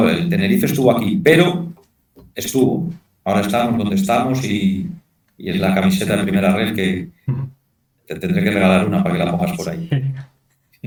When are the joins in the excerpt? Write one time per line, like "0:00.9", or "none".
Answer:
none